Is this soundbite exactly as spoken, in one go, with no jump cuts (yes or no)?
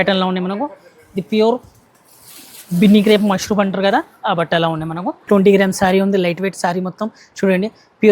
no